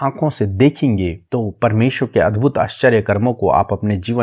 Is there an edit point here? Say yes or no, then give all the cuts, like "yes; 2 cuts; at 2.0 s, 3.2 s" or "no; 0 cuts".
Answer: yes; 1 cut; at 1.2 s